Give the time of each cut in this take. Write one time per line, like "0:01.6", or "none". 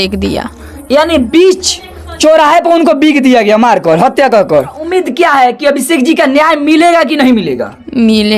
0:04.8

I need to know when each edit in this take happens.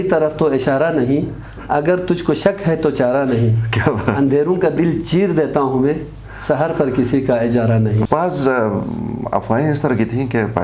0:08.1

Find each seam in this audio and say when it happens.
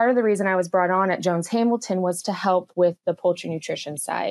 none

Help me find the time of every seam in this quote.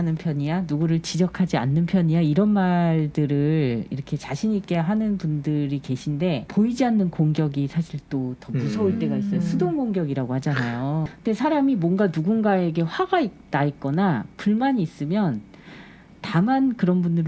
0:06.5
0:11.2

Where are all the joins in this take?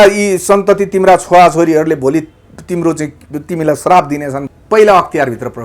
0:04.5

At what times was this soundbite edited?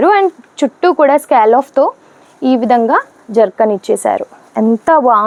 none

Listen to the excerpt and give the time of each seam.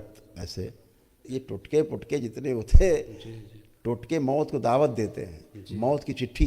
0:01.3

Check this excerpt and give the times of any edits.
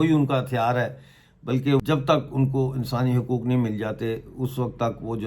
0:01.8

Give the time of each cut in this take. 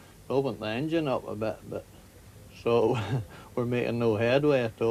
none

